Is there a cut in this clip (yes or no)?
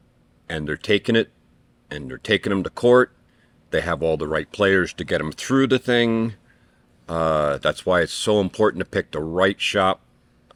no